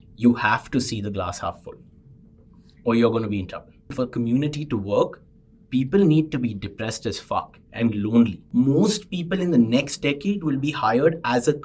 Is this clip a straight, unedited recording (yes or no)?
no